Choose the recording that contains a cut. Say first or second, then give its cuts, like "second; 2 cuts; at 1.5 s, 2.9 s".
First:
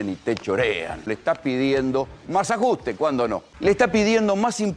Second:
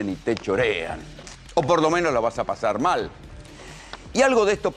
first; 2 cuts; at 1.1 s, 3.5 s